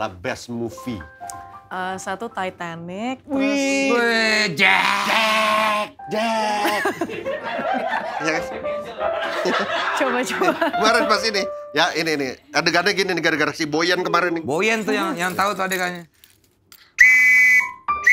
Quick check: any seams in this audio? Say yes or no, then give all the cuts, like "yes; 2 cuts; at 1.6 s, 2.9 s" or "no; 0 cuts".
no; 0 cuts